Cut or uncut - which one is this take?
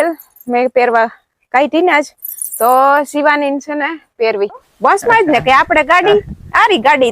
cut